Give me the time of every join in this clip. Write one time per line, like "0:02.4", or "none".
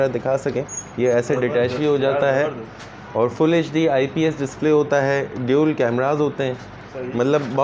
none